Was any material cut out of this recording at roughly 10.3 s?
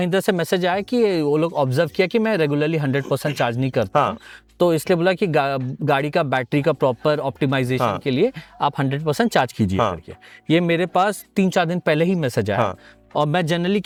no; 0 cuts

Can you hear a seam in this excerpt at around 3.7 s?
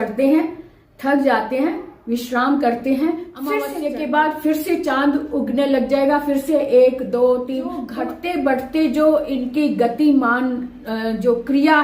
yes; 2 cuts; at 3.7 s, 7.9 s

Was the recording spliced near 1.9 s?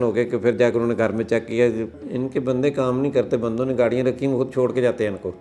yes; 1 cut; at 1.9 s

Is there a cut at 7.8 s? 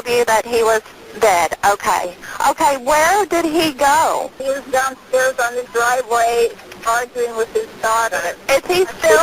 no; 2 cuts; at 2.2 s, 4.4 s

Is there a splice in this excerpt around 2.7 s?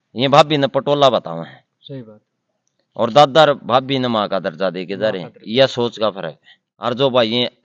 no; 1 cut; at 6.7 s

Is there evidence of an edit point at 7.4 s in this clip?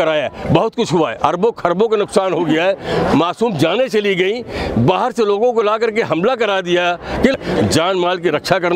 yes; 1 cut; at 7.4 s

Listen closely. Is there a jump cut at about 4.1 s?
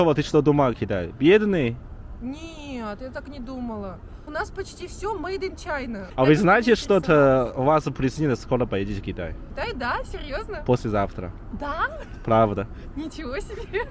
yes; 3 cuts; at 4.1 s, 6.0 s, 9.4 s

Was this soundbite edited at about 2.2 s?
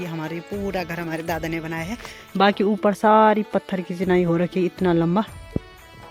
yes; 1 cut; at 2.2 s

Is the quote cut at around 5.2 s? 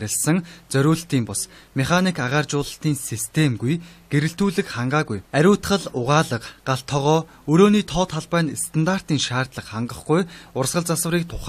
no; 1 cut; at 3.9 s

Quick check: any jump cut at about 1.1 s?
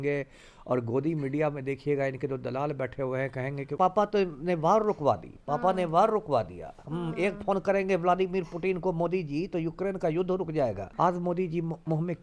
no; 2 cuts; at 3.7 s, 10.8 s

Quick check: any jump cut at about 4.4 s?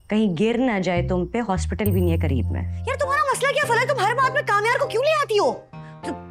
no; 1 cut; at 2.7 s

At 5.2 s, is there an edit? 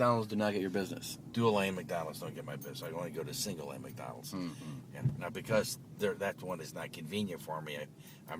yes; 1 cut; at 5.2 s

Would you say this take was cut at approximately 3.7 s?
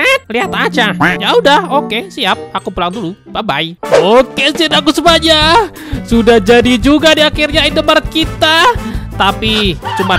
yes; 1 cut; at 3.7 s

